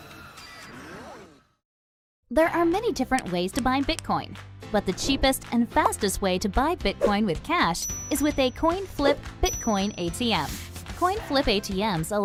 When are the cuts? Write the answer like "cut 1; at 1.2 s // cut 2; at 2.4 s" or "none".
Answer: none